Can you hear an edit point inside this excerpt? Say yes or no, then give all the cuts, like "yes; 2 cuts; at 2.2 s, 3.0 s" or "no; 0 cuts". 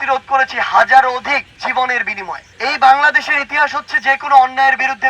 no; 0 cuts